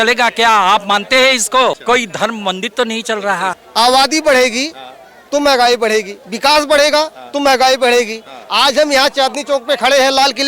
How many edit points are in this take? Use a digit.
2